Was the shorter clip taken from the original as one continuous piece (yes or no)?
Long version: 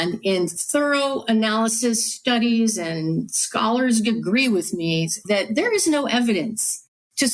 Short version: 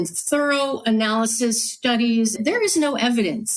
no